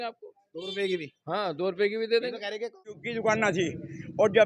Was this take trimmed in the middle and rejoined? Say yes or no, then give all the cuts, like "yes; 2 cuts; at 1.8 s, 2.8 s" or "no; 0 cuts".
yes; 1 cut; at 3.1 s